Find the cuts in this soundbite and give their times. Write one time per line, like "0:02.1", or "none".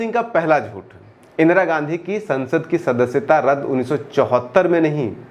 none

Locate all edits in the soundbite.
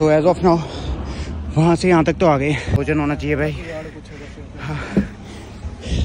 0:02.8

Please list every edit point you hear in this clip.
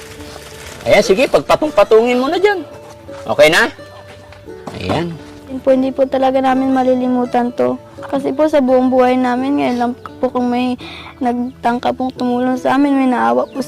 0:05.6

